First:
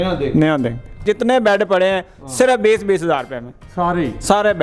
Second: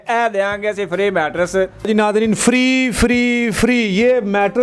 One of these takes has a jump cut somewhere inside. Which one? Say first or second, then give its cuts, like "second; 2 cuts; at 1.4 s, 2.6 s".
first; 1 cut; at 1.0 s